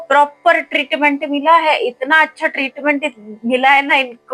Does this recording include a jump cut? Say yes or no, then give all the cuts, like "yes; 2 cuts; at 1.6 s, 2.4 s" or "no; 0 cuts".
no; 0 cuts